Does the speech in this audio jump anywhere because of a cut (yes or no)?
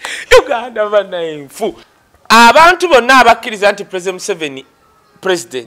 yes